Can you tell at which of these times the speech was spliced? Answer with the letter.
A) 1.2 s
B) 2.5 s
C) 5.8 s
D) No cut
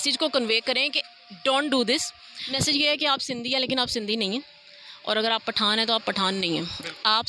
B